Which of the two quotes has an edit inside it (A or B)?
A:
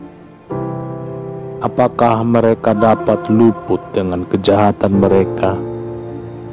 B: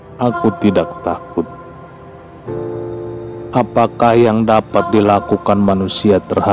A